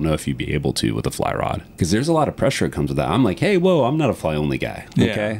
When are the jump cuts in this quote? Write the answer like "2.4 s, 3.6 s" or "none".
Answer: 1.6 s